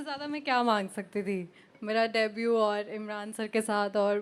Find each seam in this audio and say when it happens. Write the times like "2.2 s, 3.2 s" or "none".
none